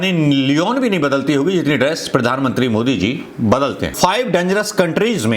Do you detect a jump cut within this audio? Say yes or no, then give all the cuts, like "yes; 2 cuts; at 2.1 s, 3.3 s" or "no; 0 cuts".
yes; 1 cut; at 3.9 s